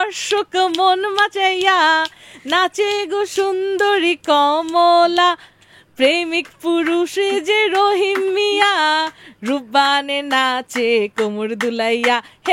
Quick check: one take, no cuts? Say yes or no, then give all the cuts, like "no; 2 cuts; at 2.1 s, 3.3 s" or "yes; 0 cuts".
yes; 0 cuts